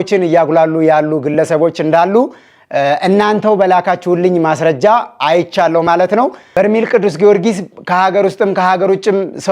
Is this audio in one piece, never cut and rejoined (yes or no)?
no